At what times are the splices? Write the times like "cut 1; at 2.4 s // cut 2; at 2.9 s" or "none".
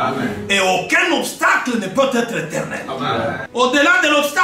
cut 1; at 3.4 s